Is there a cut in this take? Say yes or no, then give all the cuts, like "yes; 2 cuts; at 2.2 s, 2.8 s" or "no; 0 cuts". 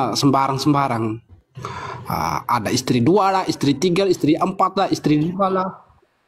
no; 0 cuts